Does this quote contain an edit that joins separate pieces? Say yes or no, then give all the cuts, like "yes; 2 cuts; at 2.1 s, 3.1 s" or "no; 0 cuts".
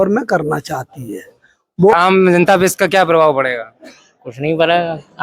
yes; 1 cut; at 1.9 s